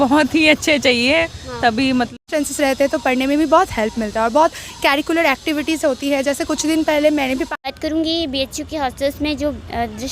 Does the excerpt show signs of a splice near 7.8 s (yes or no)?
yes